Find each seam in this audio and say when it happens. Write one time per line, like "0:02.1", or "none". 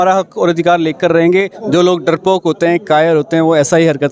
0:01.6